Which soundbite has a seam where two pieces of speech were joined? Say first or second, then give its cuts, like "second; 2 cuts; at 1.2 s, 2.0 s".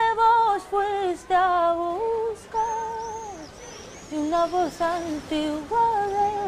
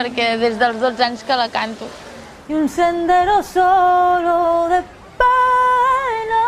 second; 1 cut; at 3.1 s